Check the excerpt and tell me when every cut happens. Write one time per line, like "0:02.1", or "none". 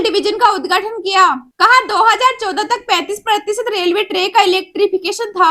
none